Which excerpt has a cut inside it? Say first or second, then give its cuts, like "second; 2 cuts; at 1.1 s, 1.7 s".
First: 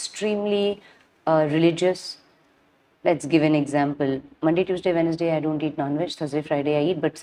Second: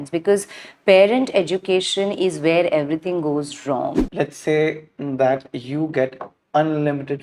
second; 1 cut; at 4.0 s